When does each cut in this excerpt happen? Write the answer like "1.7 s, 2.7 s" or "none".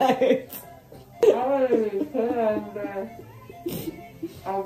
1.2 s